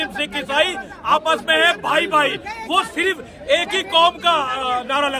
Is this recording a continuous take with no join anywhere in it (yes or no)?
yes